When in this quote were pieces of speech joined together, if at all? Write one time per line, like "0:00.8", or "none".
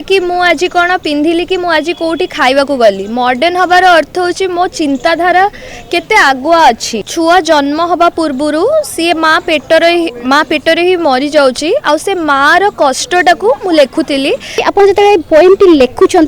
0:07.1
0:14.7